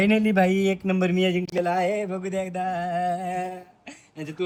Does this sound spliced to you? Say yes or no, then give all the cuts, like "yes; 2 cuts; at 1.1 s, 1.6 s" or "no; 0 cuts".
no; 0 cuts